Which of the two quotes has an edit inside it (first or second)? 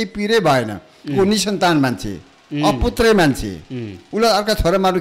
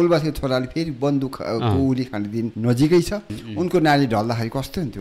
second